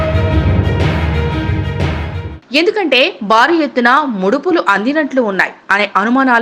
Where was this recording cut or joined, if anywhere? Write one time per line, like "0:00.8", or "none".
0:02.2